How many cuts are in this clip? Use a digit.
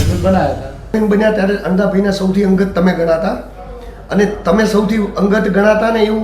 1